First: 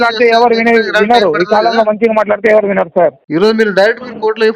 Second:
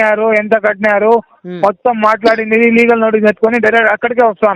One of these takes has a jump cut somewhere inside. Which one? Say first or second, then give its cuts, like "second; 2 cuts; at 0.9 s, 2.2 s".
first; 1 cut; at 3.2 s